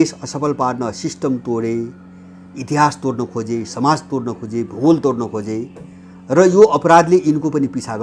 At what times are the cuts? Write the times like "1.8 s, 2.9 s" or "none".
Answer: none